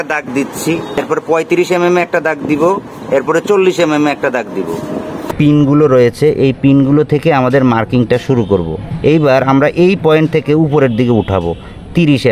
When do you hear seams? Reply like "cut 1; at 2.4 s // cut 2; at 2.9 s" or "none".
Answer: cut 1; at 1.0 s // cut 2; at 5.3 s // cut 3; at 8.8 s